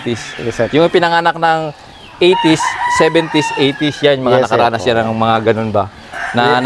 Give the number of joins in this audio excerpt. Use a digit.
0